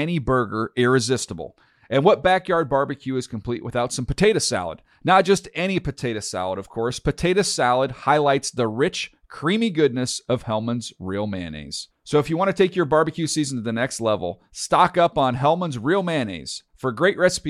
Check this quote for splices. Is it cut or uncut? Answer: uncut